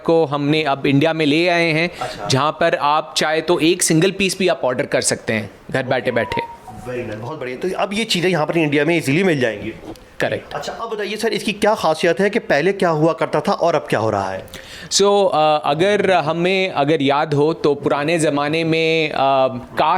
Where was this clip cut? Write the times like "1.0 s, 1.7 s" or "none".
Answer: none